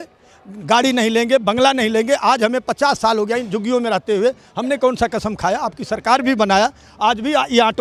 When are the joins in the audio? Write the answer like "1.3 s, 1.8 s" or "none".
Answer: none